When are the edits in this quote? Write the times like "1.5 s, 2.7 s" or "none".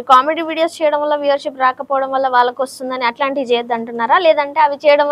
none